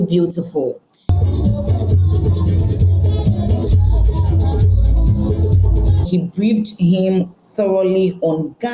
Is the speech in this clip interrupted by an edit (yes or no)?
yes